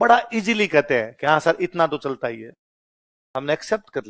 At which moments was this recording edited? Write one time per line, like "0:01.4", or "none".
none